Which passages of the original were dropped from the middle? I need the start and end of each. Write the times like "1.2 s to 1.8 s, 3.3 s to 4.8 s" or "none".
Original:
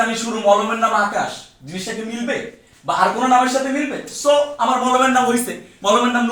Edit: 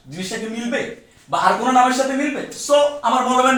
none